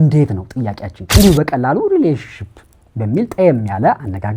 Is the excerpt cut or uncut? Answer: cut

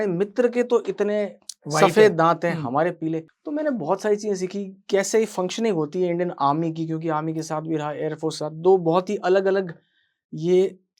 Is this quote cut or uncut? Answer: cut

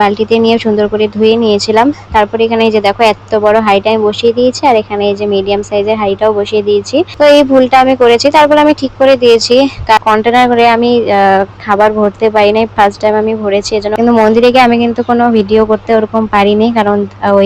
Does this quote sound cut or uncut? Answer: cut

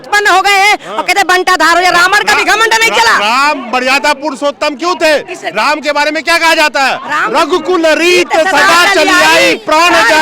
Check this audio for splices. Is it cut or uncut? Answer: uncut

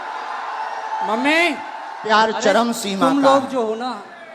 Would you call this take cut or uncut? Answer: cut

